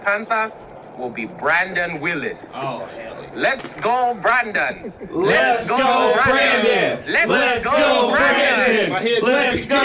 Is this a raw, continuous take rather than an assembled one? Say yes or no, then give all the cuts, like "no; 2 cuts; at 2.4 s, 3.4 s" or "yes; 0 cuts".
yes; 0 cuts